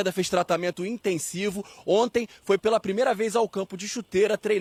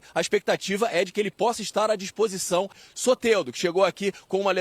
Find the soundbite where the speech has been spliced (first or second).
second